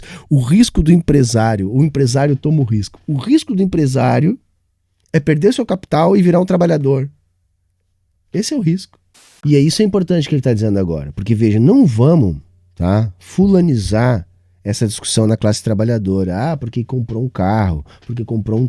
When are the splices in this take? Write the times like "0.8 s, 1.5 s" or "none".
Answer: 9.4 s